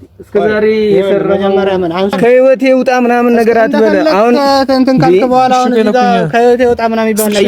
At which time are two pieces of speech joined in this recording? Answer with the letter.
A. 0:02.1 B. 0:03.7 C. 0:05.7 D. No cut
A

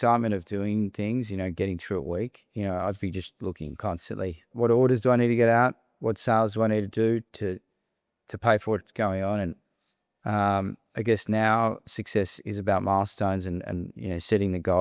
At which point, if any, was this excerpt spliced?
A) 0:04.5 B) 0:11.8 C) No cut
A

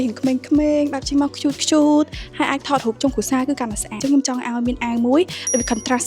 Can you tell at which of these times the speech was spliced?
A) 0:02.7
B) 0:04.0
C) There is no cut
B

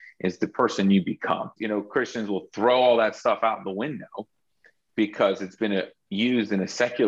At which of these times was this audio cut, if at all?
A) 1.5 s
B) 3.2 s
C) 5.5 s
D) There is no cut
A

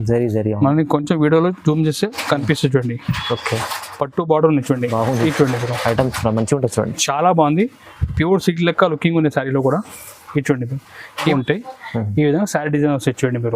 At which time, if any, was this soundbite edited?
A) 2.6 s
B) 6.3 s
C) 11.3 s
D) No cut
C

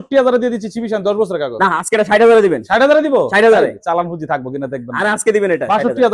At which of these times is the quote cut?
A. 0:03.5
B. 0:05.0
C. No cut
C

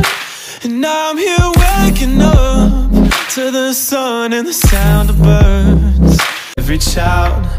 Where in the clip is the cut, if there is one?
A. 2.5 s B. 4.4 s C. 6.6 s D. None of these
C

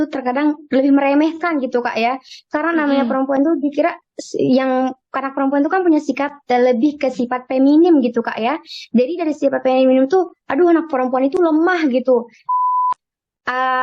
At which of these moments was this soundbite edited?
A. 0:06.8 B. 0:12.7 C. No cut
B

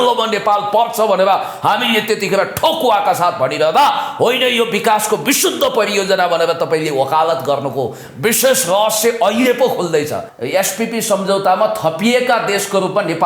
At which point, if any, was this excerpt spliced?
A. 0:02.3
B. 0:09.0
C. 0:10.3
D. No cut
C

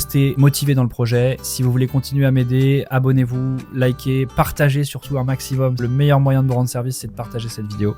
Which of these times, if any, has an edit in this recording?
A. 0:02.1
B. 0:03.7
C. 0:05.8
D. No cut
C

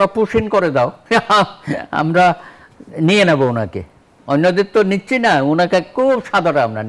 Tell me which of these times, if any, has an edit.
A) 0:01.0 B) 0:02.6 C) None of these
A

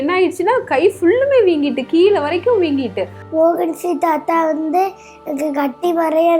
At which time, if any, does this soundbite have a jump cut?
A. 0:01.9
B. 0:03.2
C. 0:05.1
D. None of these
B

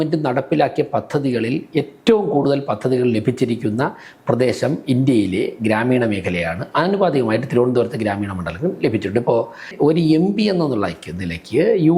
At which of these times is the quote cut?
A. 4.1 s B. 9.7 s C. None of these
B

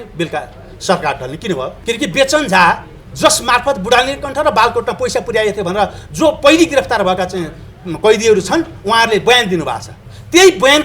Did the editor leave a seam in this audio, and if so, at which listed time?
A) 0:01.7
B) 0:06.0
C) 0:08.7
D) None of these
A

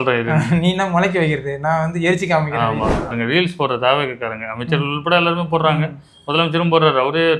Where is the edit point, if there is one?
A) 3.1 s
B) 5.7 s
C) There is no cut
A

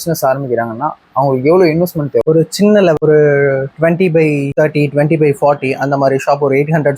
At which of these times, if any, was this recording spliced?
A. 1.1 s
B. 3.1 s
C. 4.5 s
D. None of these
C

